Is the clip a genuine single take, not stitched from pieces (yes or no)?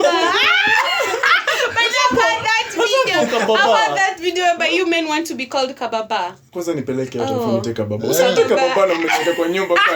yes